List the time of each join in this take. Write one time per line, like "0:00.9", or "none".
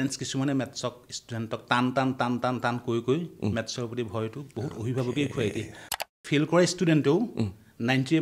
0:06.0